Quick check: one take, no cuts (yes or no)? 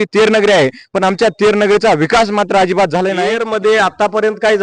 no